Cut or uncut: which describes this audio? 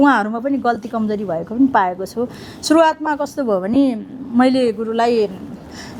uncut